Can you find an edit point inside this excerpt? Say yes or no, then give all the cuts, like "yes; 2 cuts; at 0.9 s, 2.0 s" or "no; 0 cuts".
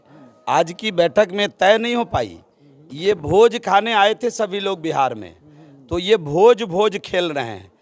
no; 0 cuts